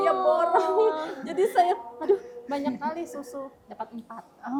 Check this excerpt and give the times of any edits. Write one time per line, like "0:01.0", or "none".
none